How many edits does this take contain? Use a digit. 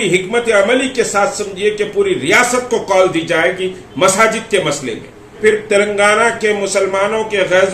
1